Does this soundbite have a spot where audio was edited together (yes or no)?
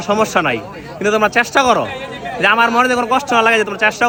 no